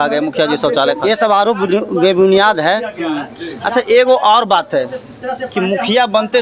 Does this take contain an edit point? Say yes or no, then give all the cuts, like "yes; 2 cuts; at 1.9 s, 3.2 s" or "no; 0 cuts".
no; 0 cuts